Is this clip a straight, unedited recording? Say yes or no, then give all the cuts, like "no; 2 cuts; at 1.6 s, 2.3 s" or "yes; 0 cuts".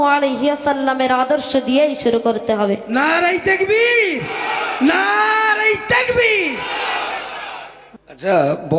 no; 1 cut; at 7.7 s